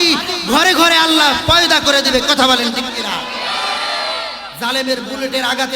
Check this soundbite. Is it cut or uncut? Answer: cut